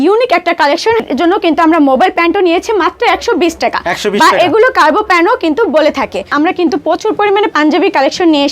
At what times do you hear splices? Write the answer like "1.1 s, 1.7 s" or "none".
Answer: 1.0 s, 6.3 s